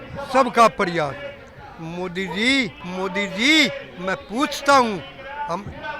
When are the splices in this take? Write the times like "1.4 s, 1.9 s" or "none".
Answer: 2.8 s